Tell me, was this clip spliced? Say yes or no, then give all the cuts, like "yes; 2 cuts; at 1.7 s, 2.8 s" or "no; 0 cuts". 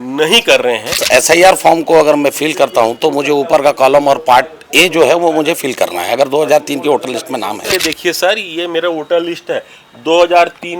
yes; 2 cuts; at 1.0 s, 7.7 s